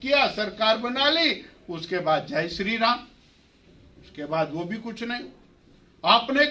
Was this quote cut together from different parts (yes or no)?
no